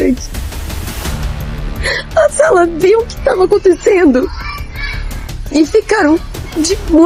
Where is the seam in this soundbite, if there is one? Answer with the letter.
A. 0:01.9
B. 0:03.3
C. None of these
C